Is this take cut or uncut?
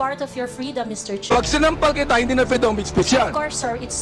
uncut